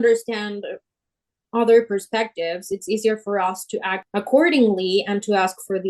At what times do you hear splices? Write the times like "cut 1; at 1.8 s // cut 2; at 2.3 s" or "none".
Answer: cut 1; at 4.0 s

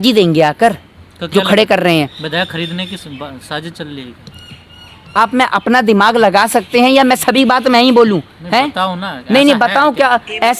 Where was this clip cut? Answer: none

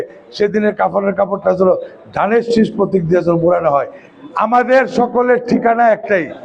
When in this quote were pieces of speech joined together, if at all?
cut 1; at 4.0 s

